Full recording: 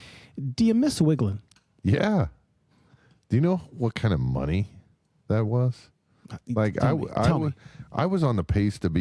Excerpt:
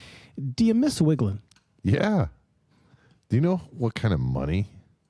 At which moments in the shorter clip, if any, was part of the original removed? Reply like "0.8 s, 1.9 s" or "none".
none

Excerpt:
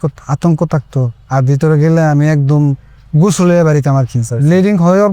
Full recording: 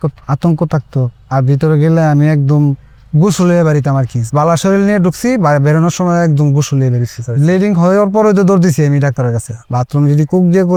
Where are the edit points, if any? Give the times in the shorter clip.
4.2 s

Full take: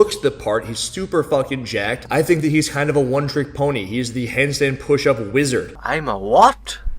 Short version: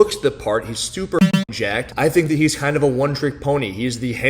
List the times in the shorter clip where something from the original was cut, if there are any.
1.3 s

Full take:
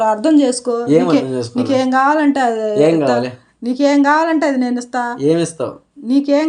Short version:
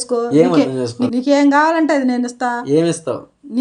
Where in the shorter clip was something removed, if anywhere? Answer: 1.0 s

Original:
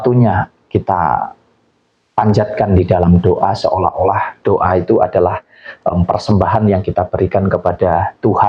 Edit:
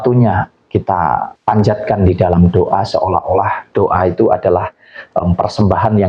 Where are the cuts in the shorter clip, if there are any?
1.3 s

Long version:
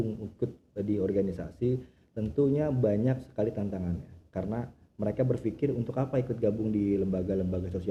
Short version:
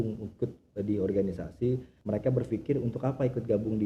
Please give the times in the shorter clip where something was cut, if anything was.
1.9 s

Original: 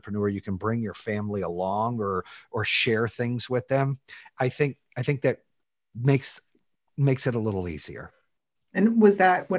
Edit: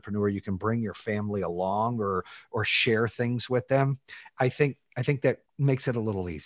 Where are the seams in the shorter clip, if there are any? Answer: 5.5 s

